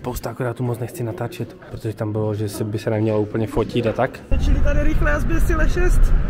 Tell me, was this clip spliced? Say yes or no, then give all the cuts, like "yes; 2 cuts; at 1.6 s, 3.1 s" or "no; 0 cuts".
yes; 2 cuts; at 1.7 s, 4.3 s